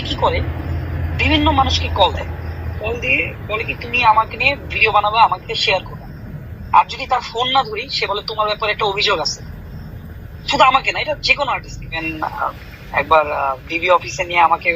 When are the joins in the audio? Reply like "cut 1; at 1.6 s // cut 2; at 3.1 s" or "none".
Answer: cut 1; at 12.0 s